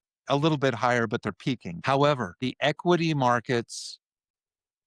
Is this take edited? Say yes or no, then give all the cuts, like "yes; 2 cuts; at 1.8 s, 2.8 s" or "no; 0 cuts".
yes; 2 cuts; at 1.7 s, 2.3 s